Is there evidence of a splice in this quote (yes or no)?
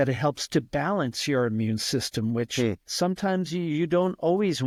no